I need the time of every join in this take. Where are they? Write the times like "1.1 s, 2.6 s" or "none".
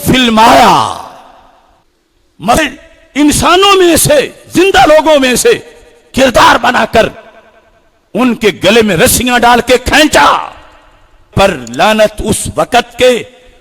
2.6 s, 11.3 s

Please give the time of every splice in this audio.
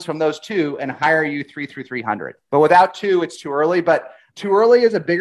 2.3 s, 4.2 s

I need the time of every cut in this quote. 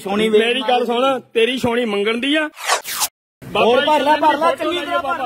2.9 s

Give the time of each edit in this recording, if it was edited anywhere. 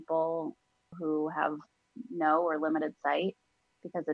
0.9 s

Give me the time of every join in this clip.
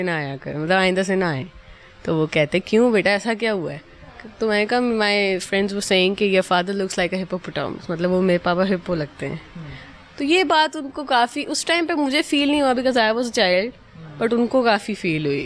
none

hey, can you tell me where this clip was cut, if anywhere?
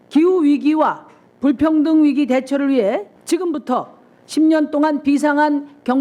3.1 s

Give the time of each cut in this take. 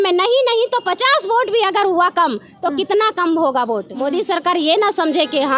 3.9 s

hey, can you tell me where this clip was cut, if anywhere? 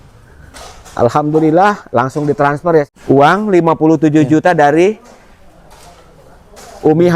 2.9 s

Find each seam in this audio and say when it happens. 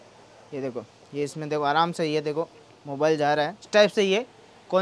3.6 s

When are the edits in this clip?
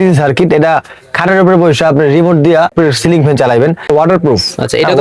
2.7 s, 3.9 s

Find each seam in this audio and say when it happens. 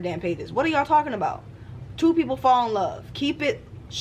none

